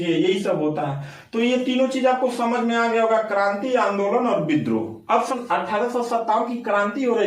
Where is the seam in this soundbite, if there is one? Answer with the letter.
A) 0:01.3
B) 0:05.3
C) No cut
B